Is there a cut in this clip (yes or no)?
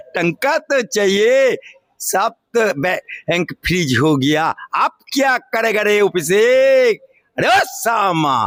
no